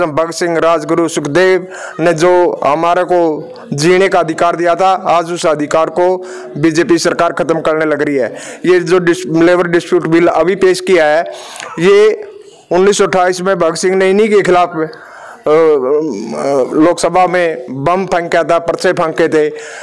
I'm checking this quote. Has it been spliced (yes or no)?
no